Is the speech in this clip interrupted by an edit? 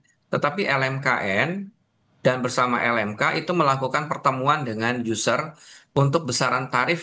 no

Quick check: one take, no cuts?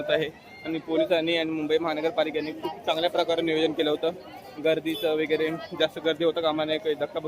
yes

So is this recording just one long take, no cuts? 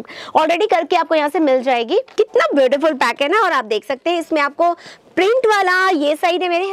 no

